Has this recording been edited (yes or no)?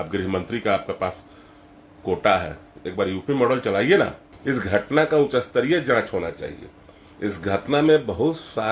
yes